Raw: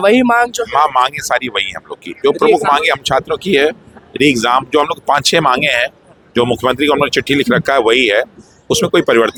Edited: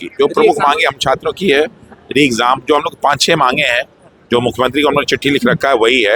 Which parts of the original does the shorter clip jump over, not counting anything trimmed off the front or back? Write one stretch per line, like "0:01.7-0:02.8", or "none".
none